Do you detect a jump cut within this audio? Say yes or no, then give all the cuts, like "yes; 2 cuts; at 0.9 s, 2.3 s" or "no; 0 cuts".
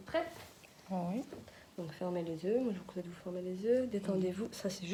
no; 0 cuts